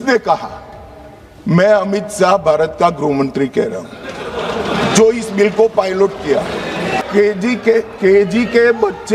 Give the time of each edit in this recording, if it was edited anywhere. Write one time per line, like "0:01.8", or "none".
0:07.0